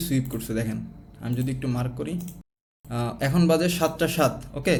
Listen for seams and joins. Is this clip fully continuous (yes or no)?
yes